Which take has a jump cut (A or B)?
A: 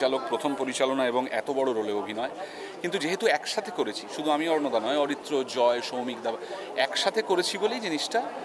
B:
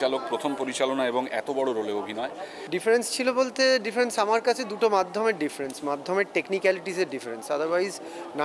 B